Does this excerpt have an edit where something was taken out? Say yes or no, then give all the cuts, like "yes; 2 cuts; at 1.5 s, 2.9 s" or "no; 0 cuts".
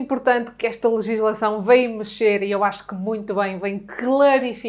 no; 0 cuts